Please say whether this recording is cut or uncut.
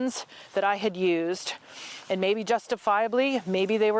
uncut